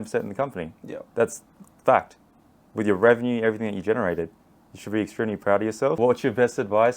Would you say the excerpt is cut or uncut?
cut